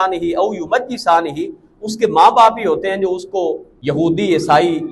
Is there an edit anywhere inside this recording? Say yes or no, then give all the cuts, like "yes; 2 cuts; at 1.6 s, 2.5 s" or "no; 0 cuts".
yes; 1 cut; at 3.7 s